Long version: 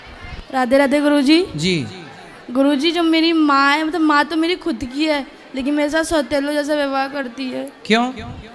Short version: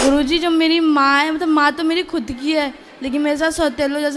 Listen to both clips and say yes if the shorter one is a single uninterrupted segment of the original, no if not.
yes